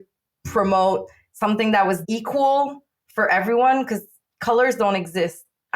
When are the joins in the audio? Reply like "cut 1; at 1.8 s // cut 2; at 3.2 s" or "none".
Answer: cut 1; at 2.0 s